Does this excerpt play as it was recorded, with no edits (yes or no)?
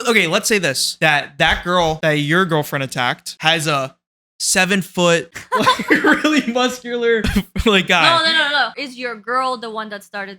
no